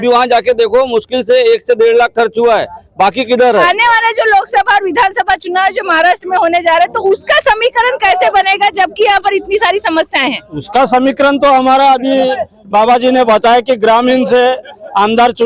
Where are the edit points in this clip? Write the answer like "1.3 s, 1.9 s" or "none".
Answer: 3.5 s